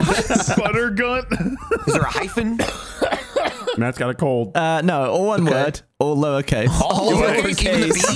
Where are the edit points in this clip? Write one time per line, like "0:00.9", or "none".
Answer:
0:04.5